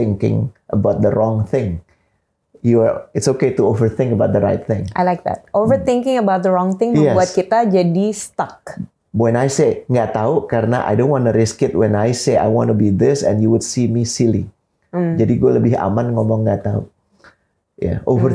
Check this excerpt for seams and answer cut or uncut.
uncut